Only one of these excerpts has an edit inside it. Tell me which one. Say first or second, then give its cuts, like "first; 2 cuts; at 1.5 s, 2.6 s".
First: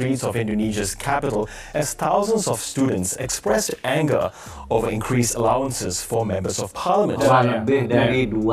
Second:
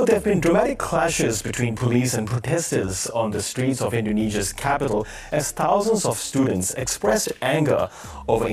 first; 1 cut; at 7.2 s